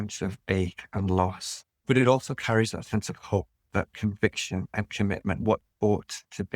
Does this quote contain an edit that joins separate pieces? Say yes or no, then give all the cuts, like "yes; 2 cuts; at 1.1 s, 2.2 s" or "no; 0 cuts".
yes; 2 cuts; at 1.8 s, 3.7 s